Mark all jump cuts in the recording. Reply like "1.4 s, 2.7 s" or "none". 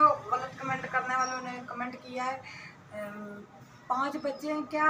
none